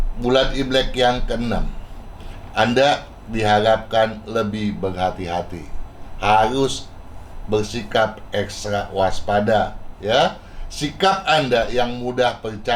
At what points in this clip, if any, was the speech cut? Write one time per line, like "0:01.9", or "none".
none